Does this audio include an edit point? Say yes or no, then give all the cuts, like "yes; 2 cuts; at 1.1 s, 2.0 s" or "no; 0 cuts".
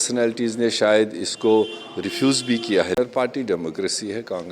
yes; 1 cut; at 3.0 s